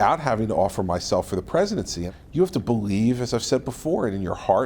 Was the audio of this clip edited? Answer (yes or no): yes